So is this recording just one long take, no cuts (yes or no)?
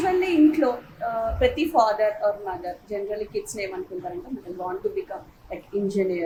yes